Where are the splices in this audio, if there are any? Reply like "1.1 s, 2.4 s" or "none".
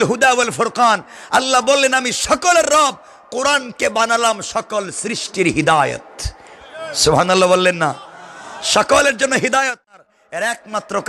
10.1 s